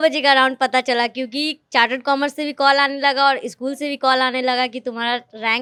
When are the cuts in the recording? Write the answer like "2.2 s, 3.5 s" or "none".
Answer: none